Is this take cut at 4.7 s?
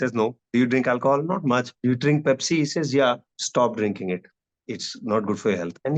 no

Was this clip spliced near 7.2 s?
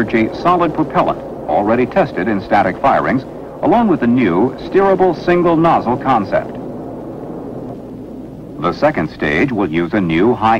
yes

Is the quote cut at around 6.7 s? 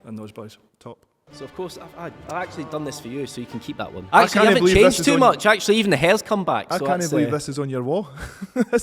no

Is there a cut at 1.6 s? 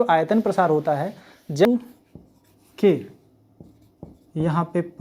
yes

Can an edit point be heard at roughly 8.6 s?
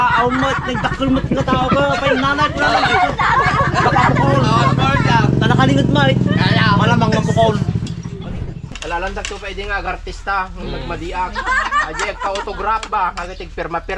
yes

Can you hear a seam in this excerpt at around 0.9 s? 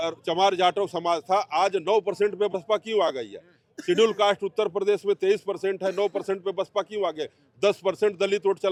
no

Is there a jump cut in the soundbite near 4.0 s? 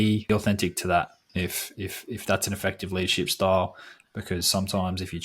no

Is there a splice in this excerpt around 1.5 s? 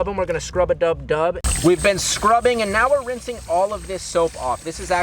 yes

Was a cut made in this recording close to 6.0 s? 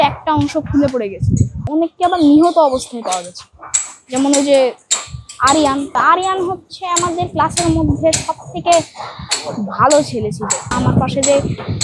yes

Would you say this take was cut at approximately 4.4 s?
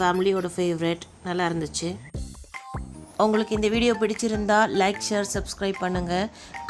no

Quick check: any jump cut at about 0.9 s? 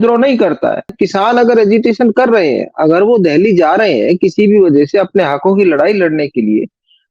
yes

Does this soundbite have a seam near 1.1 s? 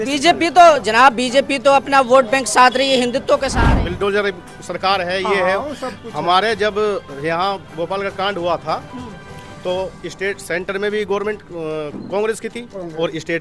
no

